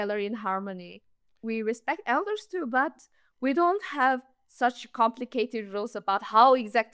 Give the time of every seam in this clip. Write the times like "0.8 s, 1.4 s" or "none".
1.3 s